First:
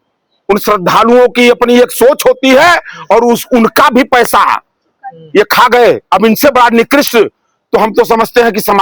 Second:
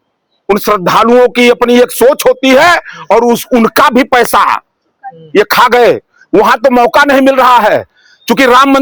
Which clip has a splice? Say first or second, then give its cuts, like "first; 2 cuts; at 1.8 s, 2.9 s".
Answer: second; 1 cut; at 6.0 s